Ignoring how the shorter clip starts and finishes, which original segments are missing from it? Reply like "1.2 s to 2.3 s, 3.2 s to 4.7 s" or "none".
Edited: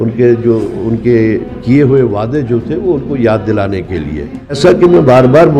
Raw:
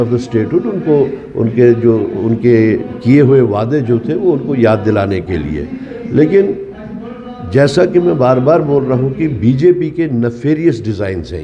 6.0 s to 7.7 s